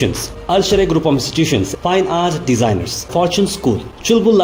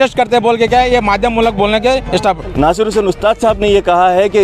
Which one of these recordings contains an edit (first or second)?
second